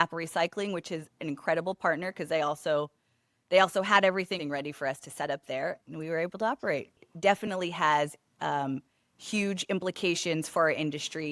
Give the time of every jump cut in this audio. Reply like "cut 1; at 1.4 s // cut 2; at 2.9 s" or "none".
cut 1; at 4.4 s // cut 2; at 5.8 s // cut 3; at 7.1 s